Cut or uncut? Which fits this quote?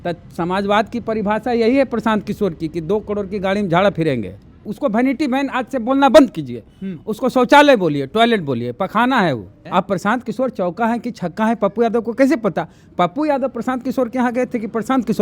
cut